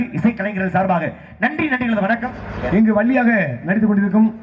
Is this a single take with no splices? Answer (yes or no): no